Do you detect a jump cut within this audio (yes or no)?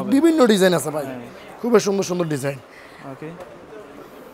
no